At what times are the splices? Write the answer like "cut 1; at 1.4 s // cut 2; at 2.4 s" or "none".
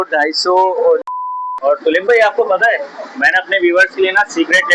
cut 1; at 1.1 s